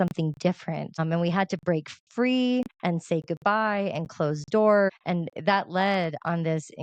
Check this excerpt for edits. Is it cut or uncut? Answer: cut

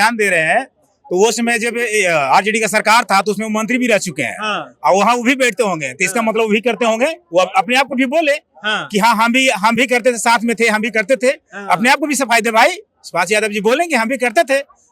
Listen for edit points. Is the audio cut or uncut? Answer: uncut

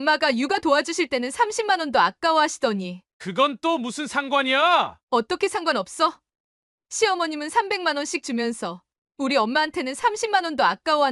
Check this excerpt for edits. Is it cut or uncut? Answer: uncut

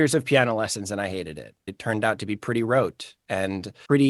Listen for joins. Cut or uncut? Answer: cut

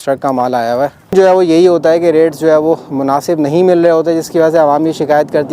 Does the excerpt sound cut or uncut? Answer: cut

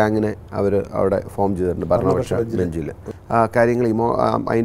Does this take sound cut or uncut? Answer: cut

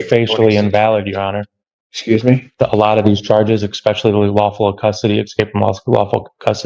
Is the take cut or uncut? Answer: uncut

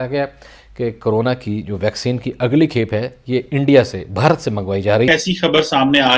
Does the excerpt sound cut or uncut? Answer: cut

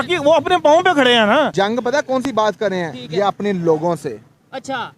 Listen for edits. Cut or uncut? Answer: cut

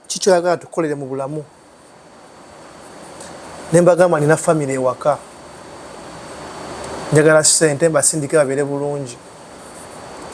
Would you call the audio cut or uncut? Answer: uncut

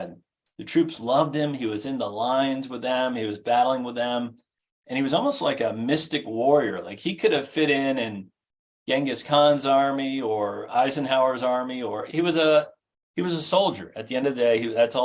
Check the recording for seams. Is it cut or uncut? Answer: cut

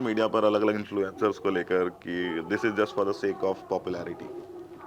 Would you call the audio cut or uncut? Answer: uncut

